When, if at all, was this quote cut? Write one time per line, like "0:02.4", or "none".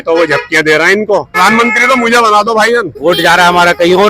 0:01.4
0:02.9